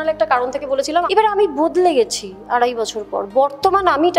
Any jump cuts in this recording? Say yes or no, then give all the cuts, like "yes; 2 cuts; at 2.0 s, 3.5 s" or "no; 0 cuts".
yes; 1 cut; at 1.1 s